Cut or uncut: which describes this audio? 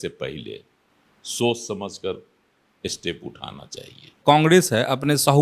cut